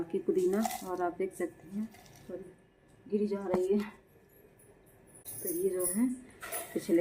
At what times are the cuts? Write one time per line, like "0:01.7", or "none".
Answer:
none